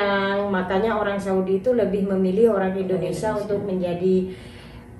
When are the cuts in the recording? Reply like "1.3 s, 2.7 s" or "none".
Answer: none